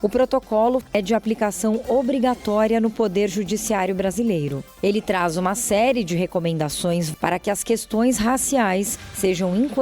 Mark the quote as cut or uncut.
cut